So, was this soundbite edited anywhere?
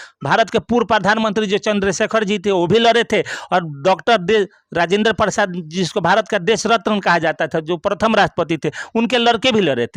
no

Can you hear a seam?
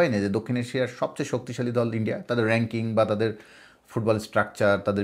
no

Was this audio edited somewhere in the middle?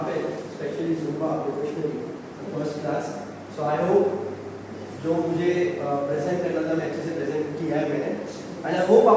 no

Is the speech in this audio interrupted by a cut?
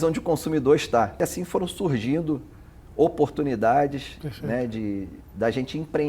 yes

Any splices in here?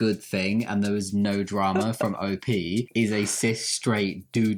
no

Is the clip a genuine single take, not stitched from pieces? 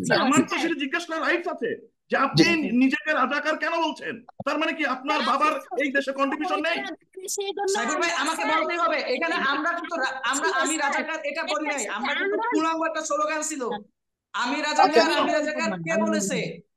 yes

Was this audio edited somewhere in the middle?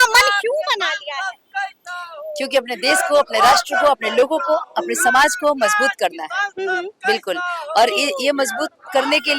no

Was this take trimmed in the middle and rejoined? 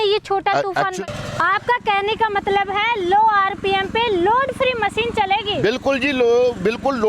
yes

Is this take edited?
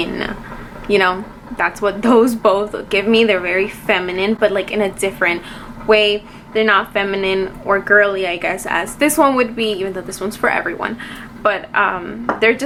no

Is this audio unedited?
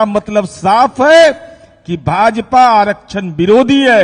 yes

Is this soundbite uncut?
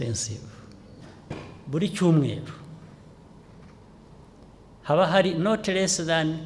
no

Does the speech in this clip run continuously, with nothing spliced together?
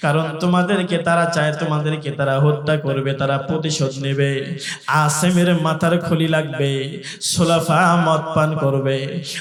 yes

